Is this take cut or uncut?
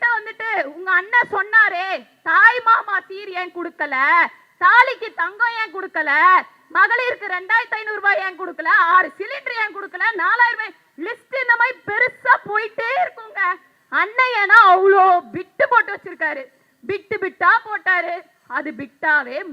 uncut